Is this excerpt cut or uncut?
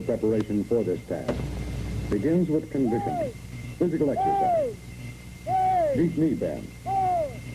cut